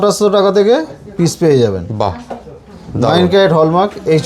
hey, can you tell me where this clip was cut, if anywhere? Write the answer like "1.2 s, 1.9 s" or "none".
none